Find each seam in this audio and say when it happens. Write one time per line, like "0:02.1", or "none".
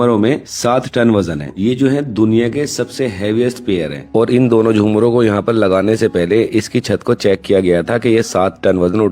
0:01.5
0:04.0

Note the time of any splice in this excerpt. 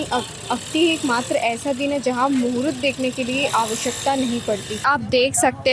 0:04.7

